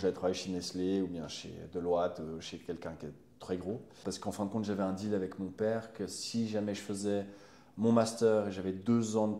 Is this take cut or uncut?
cut